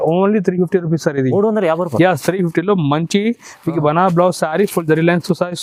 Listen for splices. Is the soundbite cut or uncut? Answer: uncut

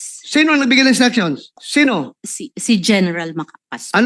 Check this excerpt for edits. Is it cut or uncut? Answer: cut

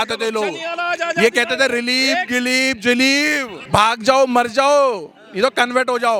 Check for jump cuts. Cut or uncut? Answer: cut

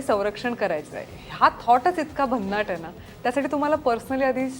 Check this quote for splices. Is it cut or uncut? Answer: uncut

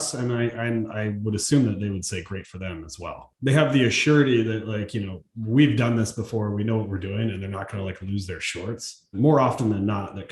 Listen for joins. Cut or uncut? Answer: cut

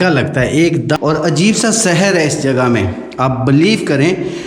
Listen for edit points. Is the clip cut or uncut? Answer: cut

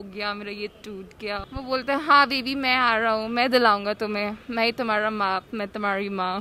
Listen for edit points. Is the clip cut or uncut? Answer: cut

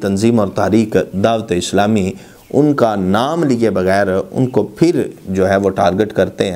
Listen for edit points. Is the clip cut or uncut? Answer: uncut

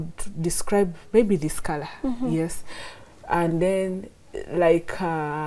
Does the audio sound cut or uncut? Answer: uncut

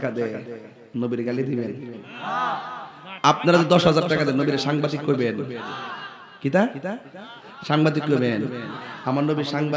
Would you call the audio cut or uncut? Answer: uncut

